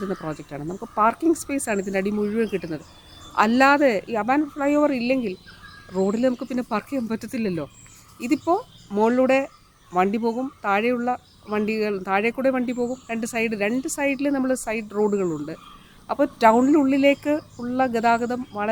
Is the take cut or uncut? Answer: uncut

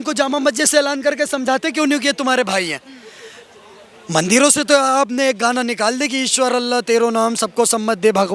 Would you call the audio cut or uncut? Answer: uncut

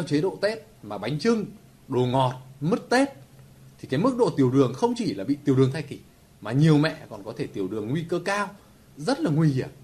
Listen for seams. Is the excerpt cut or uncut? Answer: cut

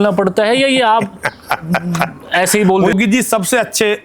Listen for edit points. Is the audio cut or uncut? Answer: cut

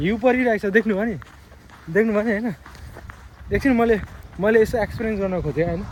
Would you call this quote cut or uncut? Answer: uncut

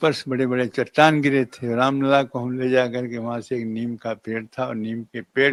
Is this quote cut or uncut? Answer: uncut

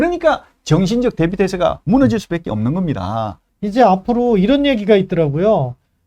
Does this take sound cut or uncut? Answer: cut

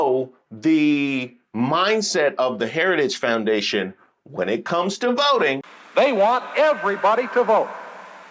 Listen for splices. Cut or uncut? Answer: cut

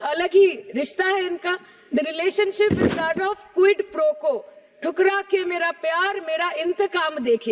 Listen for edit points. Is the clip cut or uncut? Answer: uncut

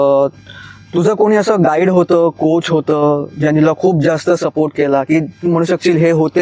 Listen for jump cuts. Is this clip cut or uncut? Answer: uncut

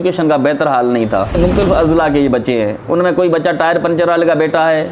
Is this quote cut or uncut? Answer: cut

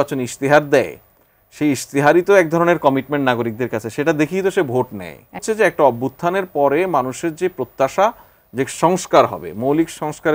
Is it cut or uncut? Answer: cut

